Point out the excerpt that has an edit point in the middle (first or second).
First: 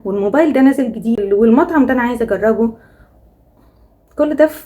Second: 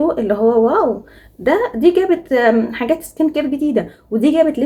first